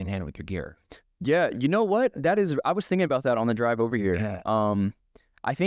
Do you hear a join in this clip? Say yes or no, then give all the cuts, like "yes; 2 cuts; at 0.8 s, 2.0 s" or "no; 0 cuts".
no; 0 cuts